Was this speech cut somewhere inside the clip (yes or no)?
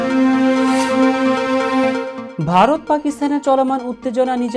yes